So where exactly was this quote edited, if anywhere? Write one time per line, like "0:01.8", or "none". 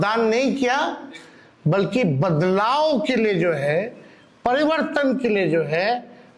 none